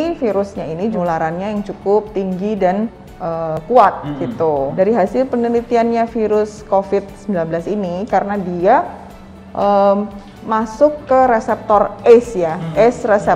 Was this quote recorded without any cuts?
no; 3 cuts; at 1.0 s, 3.6 s, 4.7 s

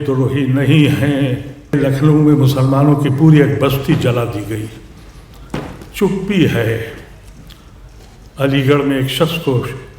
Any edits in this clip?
yes; 1 cut; at 1.7 s

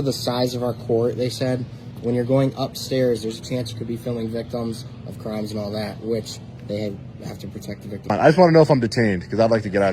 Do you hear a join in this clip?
yes; 1 cut; at 8.1 s

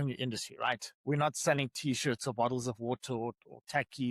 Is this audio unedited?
yes; 0 cuts

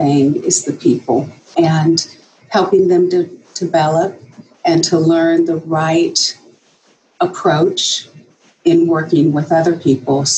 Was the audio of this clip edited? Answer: no; 0 cuts

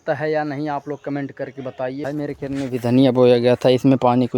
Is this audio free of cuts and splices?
no; 1 cut; at 2.0 s

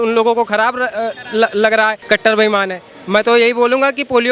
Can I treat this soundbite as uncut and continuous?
no; 1 cut; at 2.0 s

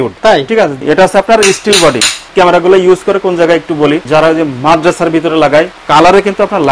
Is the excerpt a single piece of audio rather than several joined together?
no; 4 cuts; at 0.8 s, 2.3 s, 4.0 s, 5.8 s

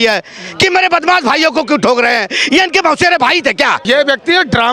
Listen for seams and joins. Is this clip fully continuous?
no; 1 cut; at 3.8 s

